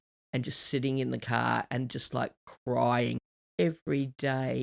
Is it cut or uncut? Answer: cut